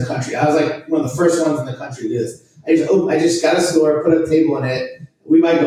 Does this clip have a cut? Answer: no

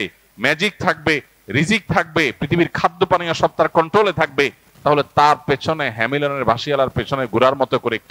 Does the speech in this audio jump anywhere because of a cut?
no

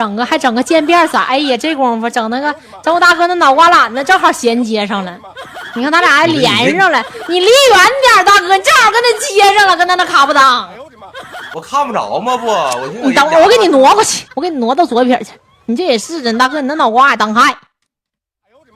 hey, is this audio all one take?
yes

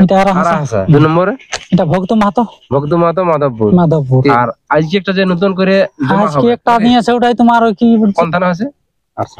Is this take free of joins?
no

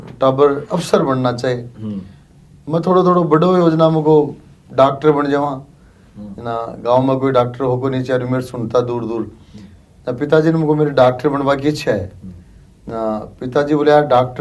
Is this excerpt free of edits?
yes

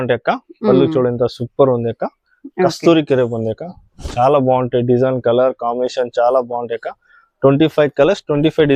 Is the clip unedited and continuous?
yes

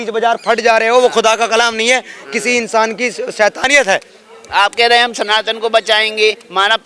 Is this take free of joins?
yes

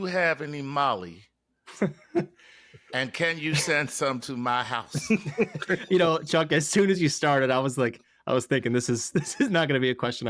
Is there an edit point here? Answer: no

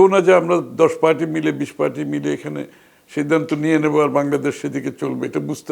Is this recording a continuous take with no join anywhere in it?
yes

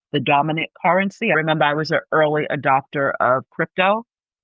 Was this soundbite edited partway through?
yes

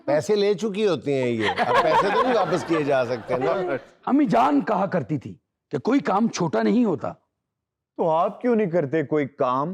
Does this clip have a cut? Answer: yes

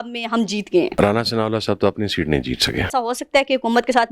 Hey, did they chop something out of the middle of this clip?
yes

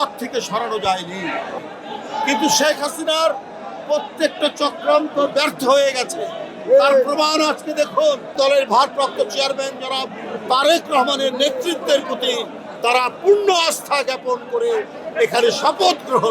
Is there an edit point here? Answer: yes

